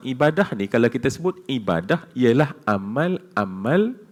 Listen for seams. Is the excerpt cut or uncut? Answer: uncut